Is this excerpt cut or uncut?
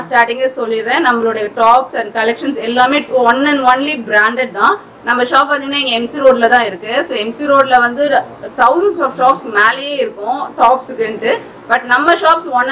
uncut